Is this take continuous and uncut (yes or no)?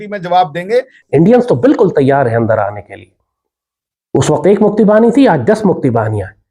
no